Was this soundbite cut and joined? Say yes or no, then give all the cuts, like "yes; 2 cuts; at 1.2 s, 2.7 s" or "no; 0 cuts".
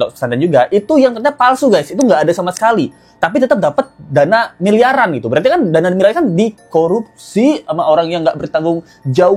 no; 0 cuts